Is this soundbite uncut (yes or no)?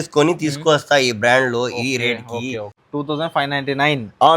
no